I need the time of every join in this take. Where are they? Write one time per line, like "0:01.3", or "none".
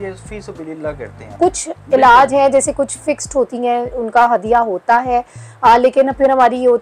0:01.3